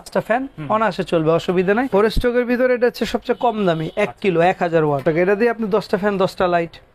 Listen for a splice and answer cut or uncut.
cut